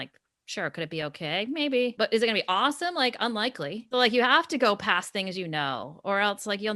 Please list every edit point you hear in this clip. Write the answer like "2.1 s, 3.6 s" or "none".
1.9 s, 3.8 s